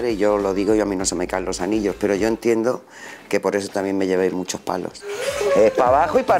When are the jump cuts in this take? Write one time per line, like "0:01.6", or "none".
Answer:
0:05.1